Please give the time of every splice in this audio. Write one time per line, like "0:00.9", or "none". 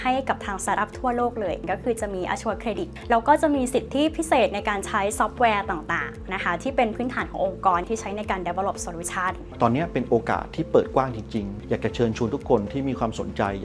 0:01.6
0:02.9
0:07.9
0:09.5
0:11.5